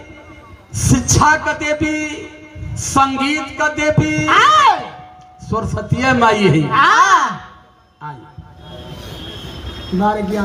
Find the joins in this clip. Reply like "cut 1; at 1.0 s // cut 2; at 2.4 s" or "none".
none